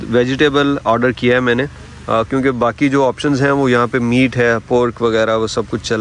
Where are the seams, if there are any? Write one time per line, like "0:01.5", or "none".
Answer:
none